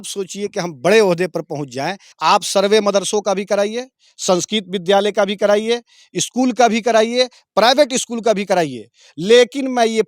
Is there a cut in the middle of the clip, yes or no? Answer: yes